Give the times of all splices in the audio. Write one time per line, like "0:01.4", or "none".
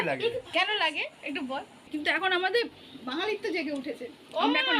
0:01.9